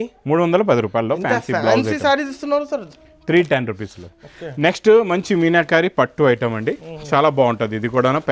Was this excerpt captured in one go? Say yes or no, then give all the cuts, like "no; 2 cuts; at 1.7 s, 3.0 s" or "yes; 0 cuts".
yes; 0 cuts